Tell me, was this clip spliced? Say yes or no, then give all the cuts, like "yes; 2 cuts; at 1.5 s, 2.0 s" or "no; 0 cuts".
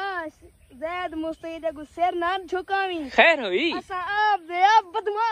no; 0 cuts